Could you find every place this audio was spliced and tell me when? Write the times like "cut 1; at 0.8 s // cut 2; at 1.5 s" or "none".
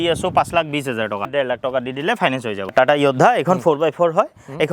cut 1; at 1.3 s // cut 2; at 2.6 s